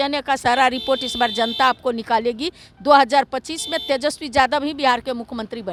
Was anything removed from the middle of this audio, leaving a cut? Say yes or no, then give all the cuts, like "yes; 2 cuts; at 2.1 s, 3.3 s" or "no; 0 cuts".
no; 0 cuts